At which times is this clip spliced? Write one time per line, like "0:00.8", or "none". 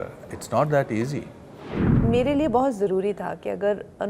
0:01.9

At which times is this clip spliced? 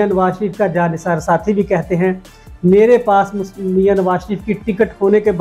none

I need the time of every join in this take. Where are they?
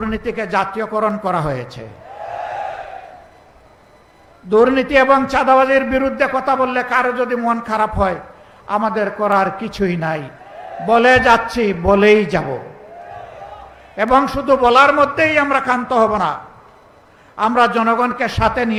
none

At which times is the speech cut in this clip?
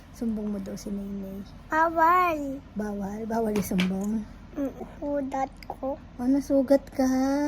0:04.8

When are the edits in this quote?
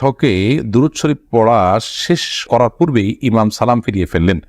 none

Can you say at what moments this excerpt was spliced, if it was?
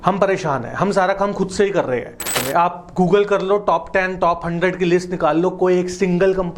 0:02.4

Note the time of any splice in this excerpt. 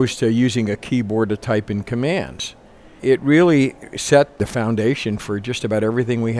0:03.0
0:04.3

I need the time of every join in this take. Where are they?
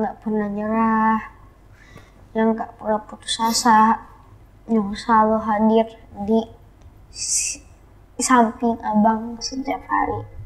none

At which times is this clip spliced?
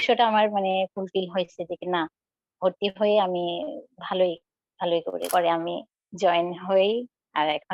0:05.2

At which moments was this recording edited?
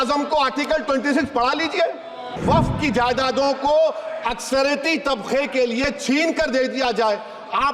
0:02.4

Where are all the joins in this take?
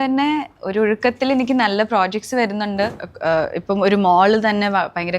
0:03.1

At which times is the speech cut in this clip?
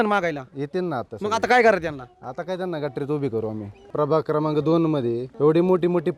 0:03.9
0:05.3

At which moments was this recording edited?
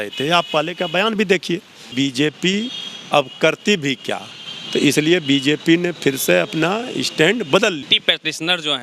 0:01.9
0:07.9

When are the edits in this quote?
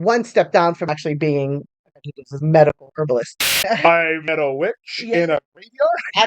0:03.5

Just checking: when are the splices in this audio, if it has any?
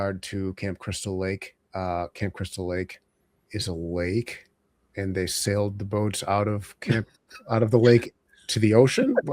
0:03.5

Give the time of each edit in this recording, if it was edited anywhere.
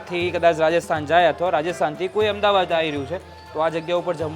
none

